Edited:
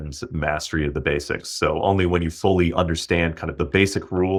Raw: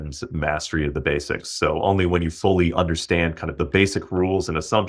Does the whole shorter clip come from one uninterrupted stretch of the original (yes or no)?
yes